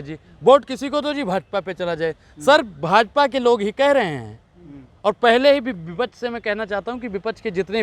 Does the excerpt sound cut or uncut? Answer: uncut